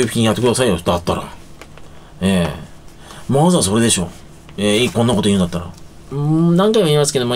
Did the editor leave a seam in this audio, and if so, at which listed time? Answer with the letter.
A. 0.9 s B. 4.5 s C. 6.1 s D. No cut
C